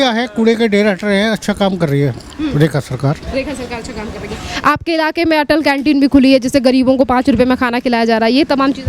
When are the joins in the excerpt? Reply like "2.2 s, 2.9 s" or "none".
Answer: none